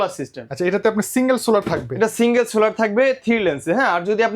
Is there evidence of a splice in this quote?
no; 0 cuts

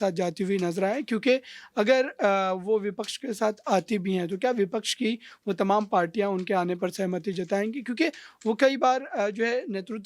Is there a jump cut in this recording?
no; 0 cuts

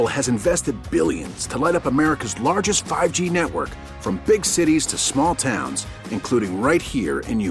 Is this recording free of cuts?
yes; 0 cuts

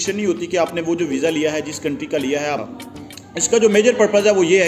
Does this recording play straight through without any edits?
no; 1 cut; at 2.6 s

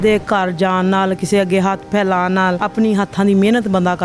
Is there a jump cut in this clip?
yes; 1 cut; at 2.6 s

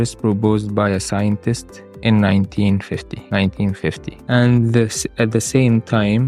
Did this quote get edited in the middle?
yes; 2 cuts; at 3.1 s, 4.1 s

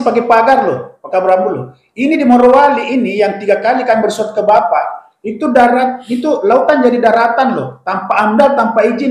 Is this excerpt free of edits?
yes; 0 cuts

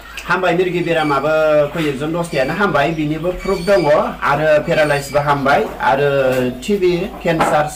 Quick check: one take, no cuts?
yes; 0 cuts

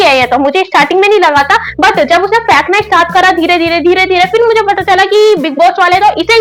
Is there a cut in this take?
no; 0 cuts

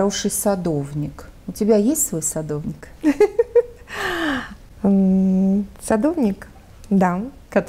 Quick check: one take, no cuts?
yes; 0 cuts

